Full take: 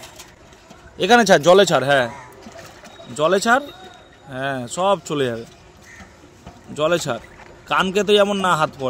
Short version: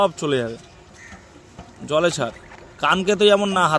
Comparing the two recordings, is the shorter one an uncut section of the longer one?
yes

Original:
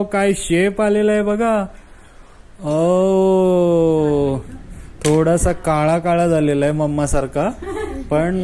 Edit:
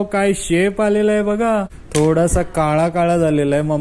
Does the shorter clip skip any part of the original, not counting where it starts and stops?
yes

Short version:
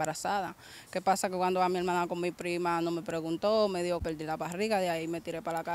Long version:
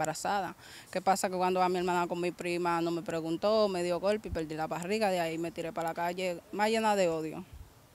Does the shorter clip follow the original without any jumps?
no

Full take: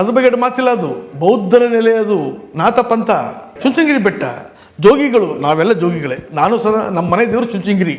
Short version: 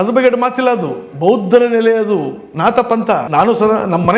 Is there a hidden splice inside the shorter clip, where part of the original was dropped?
yes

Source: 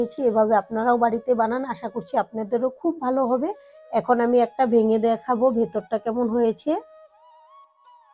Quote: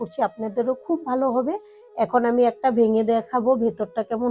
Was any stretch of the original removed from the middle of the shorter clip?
no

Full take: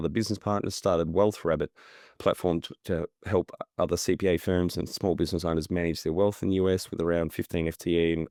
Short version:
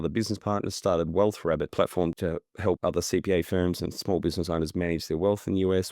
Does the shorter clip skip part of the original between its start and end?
yes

